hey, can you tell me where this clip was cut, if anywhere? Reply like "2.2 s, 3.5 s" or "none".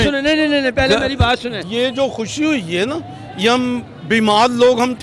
1.6 s